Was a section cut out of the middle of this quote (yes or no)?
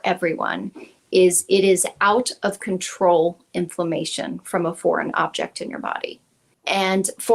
yes